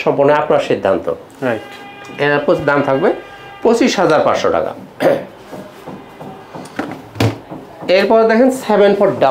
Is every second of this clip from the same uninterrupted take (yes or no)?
yes